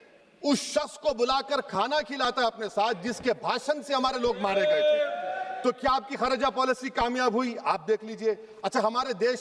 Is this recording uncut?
yes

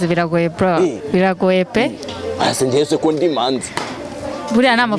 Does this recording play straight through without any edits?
yes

